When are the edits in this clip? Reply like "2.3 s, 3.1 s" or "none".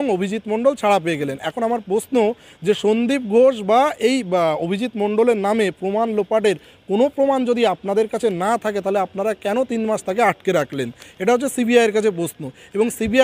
none